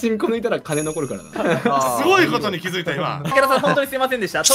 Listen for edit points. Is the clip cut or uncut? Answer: cut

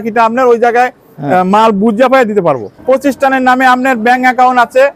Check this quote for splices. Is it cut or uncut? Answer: cut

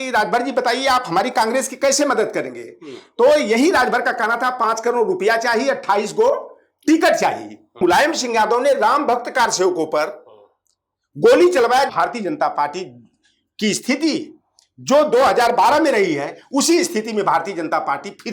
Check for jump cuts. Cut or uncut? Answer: cut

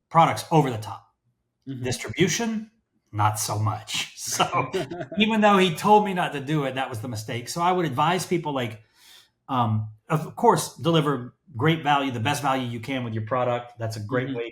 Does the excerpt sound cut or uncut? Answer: uncut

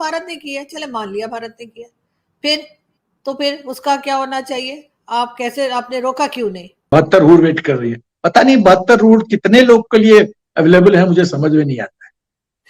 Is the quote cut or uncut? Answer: cut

